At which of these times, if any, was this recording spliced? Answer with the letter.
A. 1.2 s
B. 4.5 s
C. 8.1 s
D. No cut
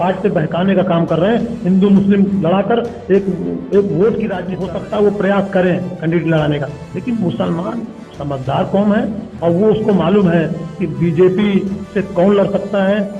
B